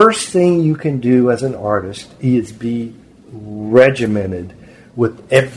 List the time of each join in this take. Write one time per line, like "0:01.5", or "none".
none